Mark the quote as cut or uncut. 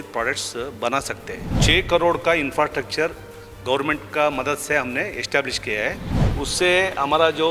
cut